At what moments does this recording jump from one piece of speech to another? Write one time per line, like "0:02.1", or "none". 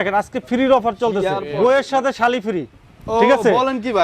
0:01.4